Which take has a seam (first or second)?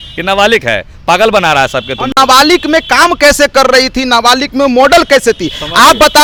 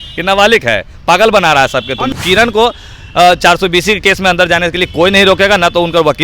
second